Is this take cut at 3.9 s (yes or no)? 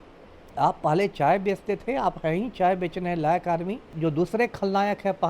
yes